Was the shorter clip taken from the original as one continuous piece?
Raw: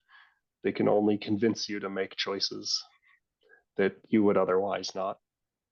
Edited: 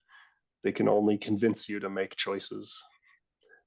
yes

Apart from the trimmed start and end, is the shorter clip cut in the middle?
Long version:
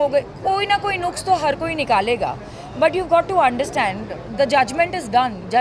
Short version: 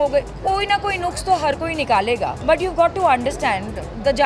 yes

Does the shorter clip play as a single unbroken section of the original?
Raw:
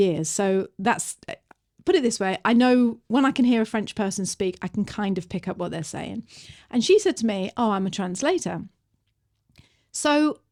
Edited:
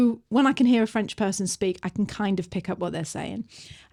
yes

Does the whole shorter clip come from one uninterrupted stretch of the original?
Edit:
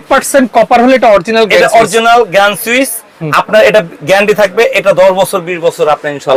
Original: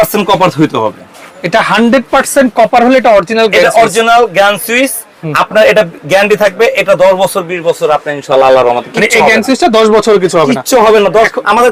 yes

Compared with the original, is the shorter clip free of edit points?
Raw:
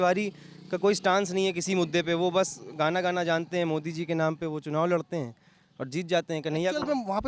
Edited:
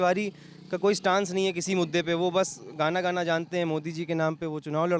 yes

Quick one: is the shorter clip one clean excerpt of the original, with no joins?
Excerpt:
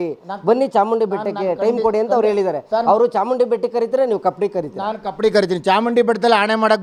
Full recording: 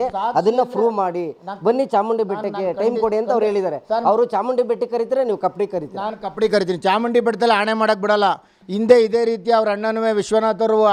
yes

